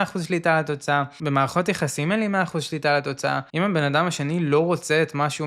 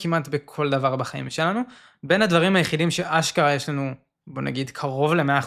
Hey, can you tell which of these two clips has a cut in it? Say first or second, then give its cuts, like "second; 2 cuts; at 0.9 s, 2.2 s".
first; 2 cuts; at 1.1 s, 3.5 s